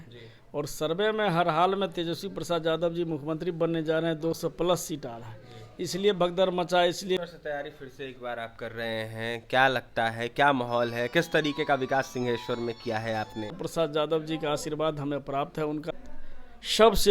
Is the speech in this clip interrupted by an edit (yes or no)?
yes